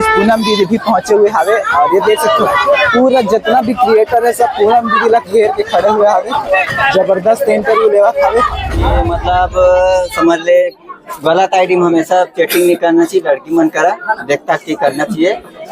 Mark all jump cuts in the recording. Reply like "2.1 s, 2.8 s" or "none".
9.0 s